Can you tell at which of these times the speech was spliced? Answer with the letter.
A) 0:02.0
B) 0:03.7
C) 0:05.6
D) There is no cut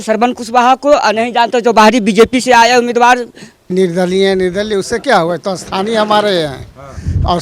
B